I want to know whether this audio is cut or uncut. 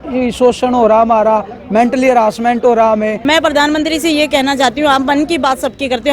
cut